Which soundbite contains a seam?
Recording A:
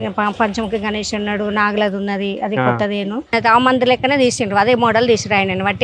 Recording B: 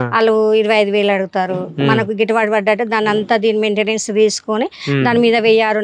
A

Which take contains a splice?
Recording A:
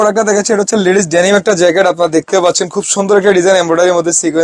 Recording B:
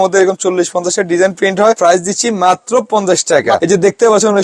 B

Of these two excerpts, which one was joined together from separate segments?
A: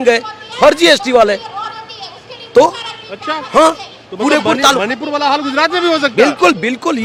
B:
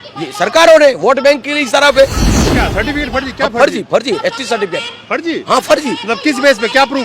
B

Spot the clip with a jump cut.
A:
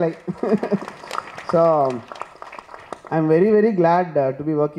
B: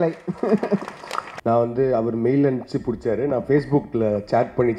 B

